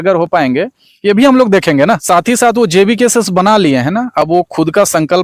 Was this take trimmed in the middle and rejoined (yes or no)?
yes